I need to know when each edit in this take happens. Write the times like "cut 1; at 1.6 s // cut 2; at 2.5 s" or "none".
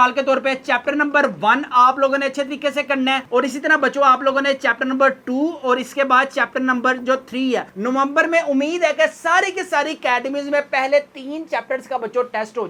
none